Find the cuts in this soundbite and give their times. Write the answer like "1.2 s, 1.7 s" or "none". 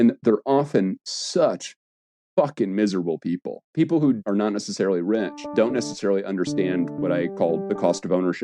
3.5 s, 4.2 s, 5.5 s, 7.3 s